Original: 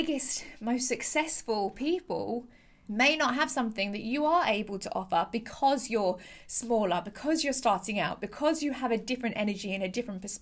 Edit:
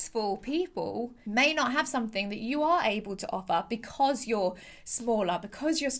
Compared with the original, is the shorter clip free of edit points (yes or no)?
no